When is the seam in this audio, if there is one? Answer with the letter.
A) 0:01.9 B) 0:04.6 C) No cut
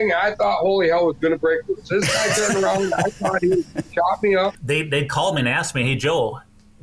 B